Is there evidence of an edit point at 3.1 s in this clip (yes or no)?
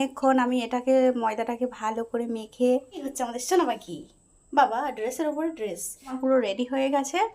yes